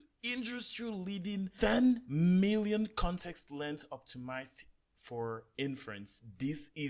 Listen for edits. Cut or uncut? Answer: uncut